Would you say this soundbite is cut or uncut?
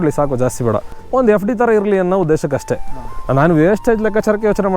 cut